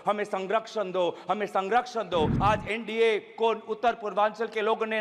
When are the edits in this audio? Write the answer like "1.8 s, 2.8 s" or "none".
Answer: 2.3 s